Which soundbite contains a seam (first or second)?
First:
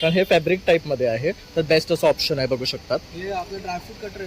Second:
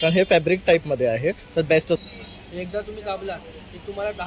second